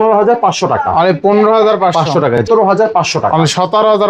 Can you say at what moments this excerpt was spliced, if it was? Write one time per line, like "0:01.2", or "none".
0:02.5